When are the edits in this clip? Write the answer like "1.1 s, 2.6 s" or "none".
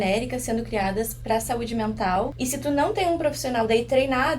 2.3 s